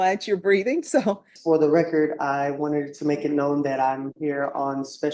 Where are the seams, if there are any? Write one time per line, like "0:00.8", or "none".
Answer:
0:01.3